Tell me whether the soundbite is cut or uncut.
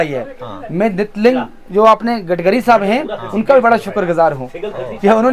uncut